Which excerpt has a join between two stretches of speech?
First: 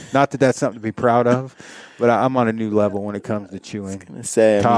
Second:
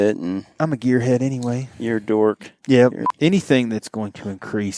second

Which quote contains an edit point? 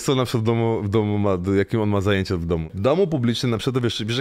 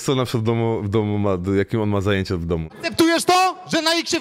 second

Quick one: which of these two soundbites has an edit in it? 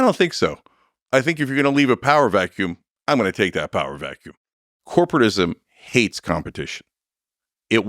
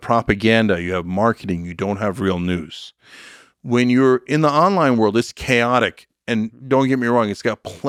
first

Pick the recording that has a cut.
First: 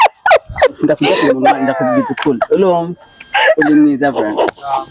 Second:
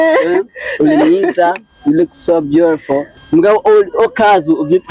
second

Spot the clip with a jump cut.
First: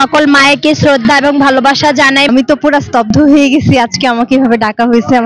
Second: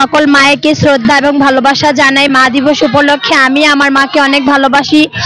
first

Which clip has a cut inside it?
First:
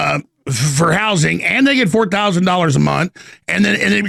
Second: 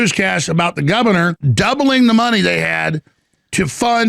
second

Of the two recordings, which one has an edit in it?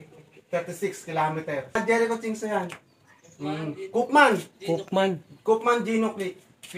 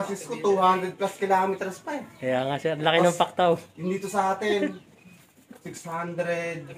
first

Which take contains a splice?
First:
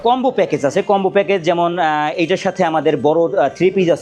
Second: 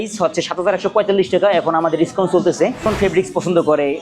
second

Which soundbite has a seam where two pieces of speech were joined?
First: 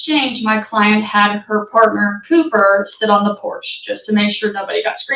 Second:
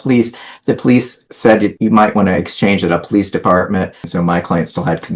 second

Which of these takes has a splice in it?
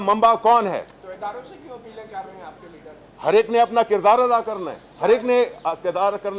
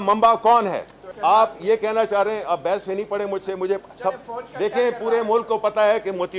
second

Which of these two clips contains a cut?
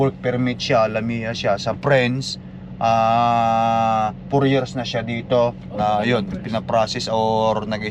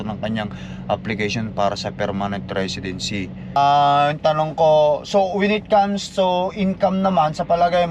second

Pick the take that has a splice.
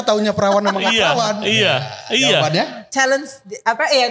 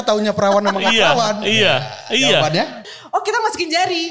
second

